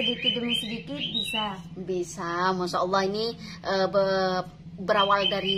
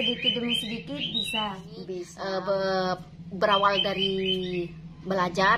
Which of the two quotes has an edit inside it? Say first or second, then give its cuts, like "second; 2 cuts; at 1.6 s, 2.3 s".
second; 1 cut; at 2.1 s